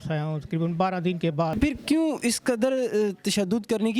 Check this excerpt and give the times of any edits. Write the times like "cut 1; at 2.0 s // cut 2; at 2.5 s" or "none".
cut 1; at 1.5 s